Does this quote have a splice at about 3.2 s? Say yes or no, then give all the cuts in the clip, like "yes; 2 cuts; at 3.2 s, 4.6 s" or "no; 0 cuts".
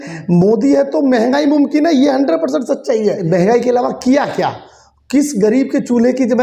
yes; 1 cut; at 3.2 s